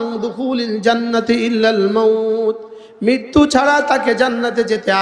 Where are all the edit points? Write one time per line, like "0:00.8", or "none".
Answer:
none